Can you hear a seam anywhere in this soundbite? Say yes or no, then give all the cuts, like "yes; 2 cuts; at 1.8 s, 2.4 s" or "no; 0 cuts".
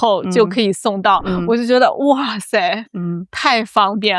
no; 0 cuts